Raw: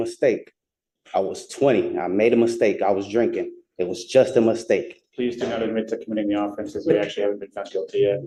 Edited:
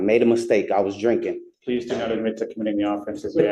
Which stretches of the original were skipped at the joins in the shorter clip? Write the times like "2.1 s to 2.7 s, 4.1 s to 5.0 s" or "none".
3.6 s to 5.0 s